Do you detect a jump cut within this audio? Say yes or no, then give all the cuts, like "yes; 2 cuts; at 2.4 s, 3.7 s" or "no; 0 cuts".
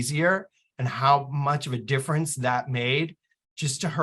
no; 0 cuts